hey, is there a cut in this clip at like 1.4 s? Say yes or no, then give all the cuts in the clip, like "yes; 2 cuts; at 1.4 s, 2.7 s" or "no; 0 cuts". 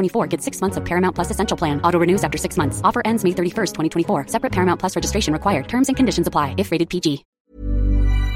no; 1 cut; at 7.3 s